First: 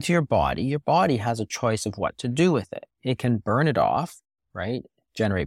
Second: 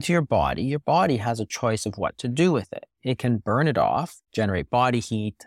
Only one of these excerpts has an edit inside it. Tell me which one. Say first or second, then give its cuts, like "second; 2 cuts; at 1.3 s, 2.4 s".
second; 1 cut; at 4.2 s